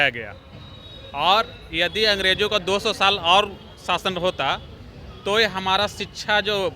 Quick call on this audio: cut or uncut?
uncut